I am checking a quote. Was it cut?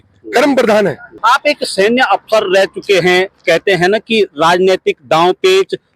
yes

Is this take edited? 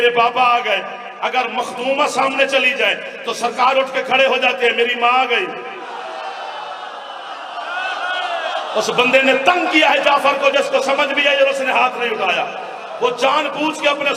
no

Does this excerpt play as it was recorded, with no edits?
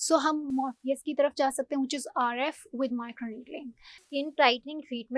no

